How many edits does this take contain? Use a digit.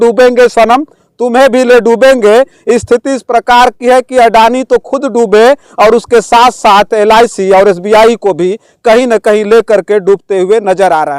0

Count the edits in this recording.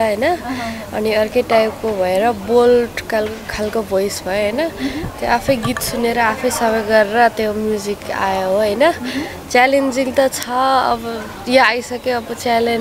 0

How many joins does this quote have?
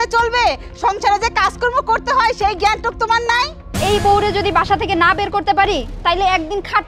1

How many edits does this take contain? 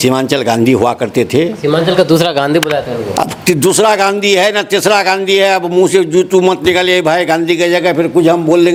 0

